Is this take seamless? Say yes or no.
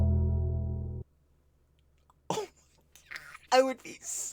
yes